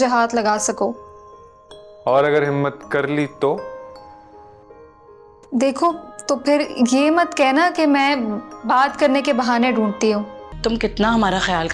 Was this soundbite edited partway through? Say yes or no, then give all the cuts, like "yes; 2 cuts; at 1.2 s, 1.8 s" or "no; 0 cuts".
yes; 1 cut; at 10.4 s